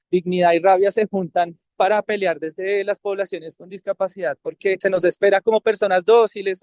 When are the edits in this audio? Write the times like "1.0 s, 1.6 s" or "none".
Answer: 4.8 s